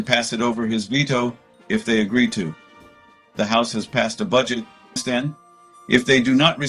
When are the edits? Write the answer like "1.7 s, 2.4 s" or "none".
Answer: 5.0 s